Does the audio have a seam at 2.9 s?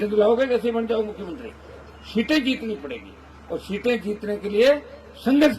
no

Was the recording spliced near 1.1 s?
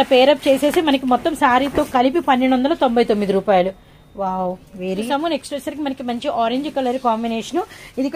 no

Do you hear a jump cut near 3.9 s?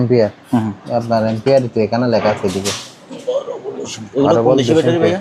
no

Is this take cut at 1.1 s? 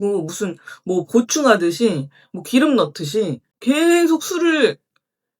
no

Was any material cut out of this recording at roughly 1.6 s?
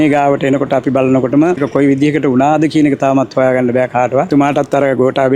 yes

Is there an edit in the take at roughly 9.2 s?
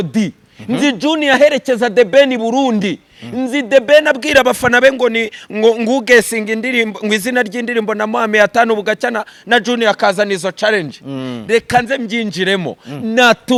no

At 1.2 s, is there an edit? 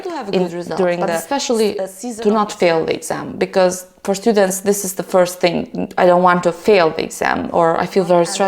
yes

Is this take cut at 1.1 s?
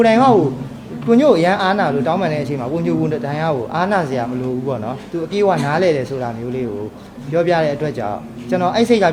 no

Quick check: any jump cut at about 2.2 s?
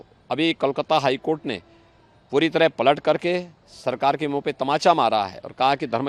no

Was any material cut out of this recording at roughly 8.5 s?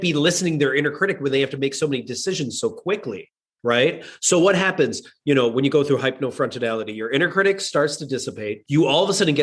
yes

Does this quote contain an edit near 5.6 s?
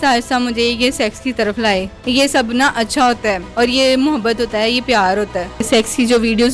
yes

